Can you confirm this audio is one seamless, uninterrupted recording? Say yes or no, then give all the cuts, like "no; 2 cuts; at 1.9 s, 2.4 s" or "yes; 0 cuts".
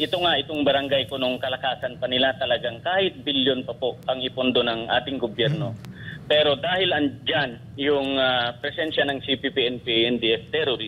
yes; 0 cuts